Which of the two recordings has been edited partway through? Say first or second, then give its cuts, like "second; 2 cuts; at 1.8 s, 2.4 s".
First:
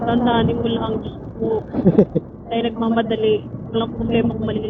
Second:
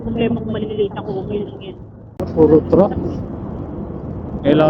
second; 1 cut; at 2.2 s